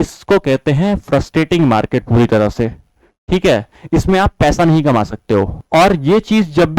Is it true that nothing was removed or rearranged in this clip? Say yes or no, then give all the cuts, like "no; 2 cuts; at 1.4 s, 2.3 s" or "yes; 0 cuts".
no; 1 cut; at 5.6 s